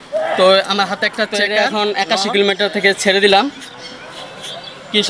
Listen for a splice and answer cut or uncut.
cut